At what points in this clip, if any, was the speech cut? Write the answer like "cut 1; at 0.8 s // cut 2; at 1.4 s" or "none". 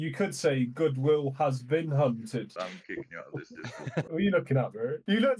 cut 1; at 4.1 s